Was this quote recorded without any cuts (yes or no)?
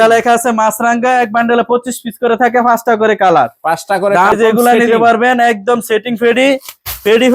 no